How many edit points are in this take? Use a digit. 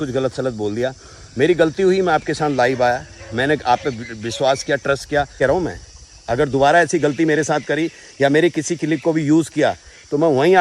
1